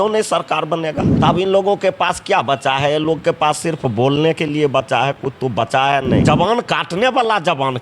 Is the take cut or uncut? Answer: cut